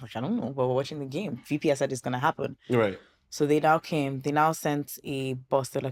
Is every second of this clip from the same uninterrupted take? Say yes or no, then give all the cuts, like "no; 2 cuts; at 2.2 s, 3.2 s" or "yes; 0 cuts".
yes; 0 cuts